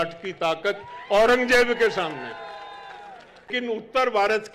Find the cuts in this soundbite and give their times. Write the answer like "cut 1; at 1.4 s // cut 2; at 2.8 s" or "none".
cut 1; at 3.5 s